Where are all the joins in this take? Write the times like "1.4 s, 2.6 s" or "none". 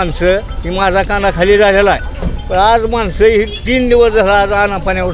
none